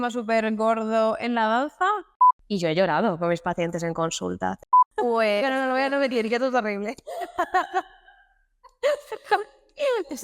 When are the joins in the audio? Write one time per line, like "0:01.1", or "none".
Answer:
0:02.1
0:04.6